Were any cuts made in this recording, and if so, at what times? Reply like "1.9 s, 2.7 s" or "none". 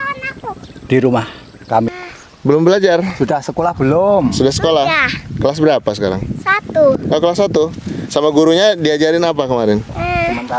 1.9 s